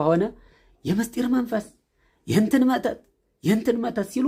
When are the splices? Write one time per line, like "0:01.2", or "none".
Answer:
none

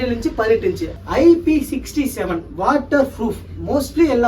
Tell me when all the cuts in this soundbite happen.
0:00.9

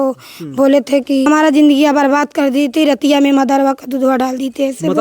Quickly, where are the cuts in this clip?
0:01.3

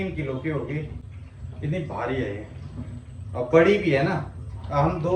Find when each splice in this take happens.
none

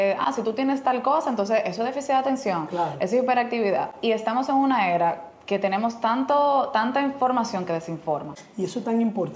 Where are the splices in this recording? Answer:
0:08.4

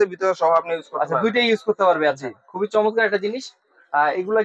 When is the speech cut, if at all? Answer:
none

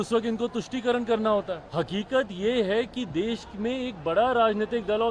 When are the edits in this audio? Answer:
0:01.6

